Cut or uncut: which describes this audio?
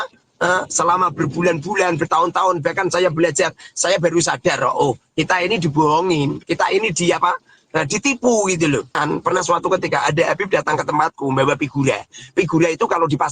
cut